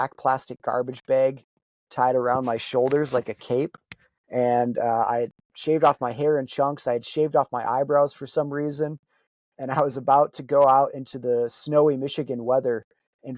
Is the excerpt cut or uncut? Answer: uncut